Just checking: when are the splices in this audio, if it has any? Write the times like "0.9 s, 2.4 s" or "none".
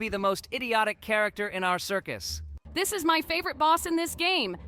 2.5 s